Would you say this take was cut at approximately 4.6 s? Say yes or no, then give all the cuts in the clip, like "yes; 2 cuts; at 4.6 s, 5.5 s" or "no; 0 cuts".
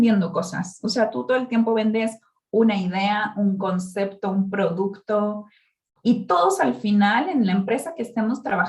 no; 0 cuts